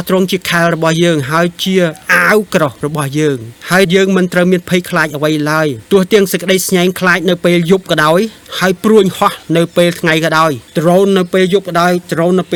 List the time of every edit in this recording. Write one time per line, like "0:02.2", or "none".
none